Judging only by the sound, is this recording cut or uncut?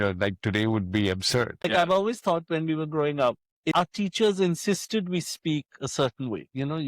cut